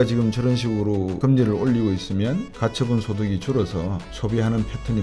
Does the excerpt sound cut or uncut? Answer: cut